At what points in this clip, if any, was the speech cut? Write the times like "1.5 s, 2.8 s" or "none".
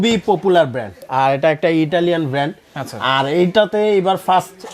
1.0 s